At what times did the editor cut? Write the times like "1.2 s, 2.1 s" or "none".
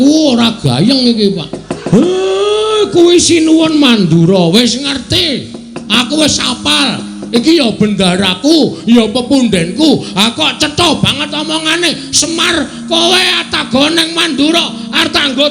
1.7 s